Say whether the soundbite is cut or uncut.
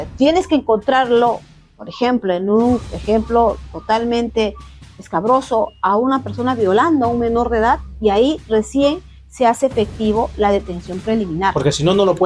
uncut